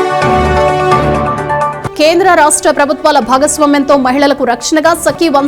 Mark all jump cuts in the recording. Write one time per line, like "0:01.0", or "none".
0:01.7